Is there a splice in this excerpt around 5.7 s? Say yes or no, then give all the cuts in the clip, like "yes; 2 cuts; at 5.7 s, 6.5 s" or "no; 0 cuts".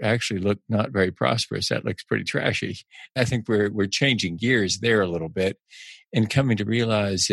no; 1 cut; at 3.2 s